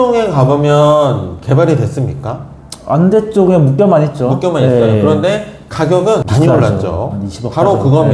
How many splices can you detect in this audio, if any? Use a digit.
0